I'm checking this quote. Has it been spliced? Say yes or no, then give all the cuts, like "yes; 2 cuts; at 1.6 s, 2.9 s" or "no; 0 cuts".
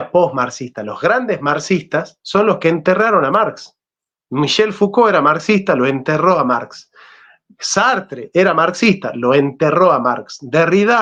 no; 0 cuts